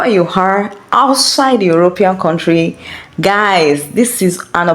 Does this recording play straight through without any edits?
yes; 0 cuts

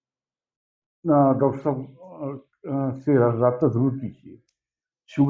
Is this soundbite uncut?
yes; 0 cuts

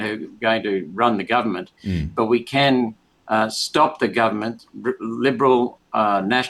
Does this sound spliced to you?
no; 0 cuts

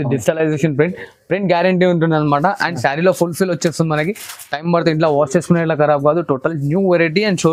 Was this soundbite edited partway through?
no; 0 cuts

